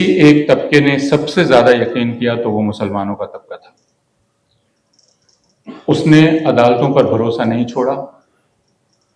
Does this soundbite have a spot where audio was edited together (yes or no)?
no